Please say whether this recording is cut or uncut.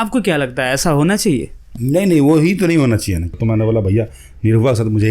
cut